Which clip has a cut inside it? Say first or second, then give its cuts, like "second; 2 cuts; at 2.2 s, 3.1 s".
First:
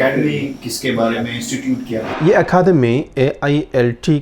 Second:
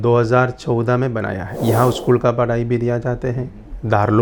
second; 1 cut; at 1.5 s